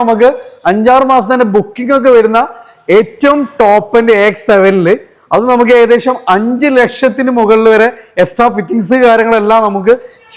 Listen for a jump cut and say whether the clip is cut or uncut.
uncut